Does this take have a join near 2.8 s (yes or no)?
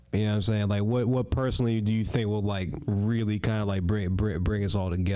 yes